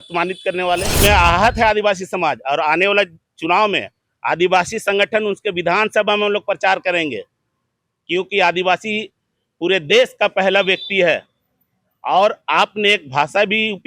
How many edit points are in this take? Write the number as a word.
one